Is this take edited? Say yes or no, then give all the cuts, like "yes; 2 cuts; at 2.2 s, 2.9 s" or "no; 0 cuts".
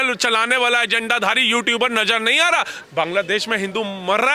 yes; 1 cut; at 2.8 s